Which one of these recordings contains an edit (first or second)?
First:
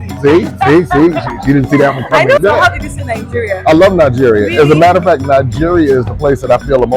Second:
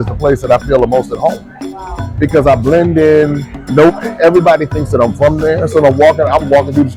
first